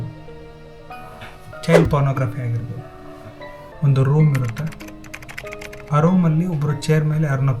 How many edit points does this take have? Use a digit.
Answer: 1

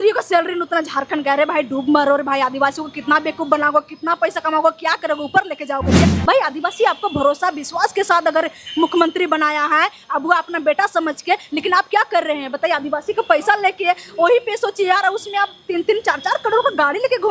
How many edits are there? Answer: 1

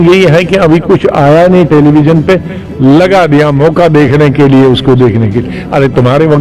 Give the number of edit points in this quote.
0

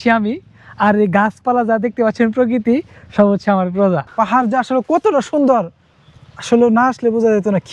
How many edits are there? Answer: 1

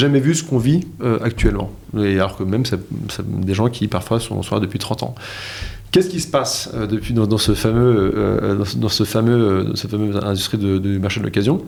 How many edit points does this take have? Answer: 0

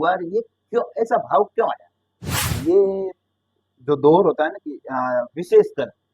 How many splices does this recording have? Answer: 1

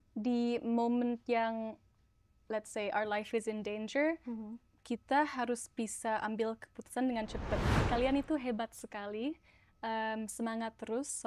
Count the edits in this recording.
1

